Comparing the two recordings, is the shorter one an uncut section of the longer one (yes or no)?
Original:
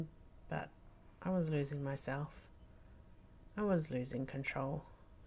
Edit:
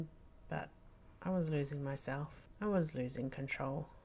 no